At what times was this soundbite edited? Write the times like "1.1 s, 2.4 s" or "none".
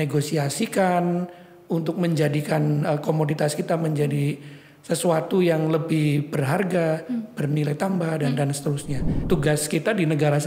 9.2 s